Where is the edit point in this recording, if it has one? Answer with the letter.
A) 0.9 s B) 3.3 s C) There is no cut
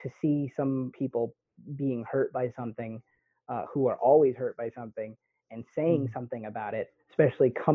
A